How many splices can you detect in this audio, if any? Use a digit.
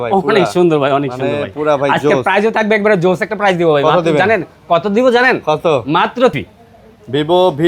1